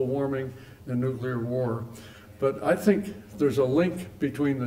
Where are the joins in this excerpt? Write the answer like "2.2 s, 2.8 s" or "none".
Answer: none

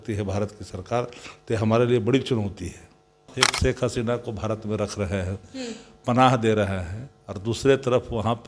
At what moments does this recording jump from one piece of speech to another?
3.2 s

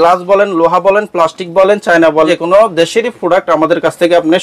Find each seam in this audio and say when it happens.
2.3 s

